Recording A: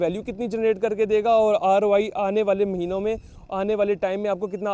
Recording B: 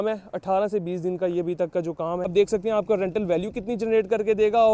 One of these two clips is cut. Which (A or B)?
B